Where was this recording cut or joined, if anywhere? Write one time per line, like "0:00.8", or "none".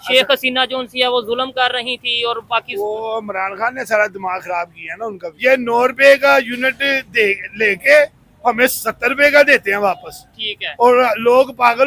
0:05.2